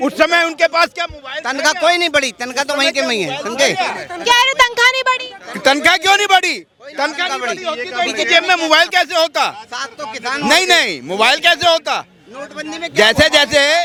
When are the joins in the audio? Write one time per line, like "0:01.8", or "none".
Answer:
none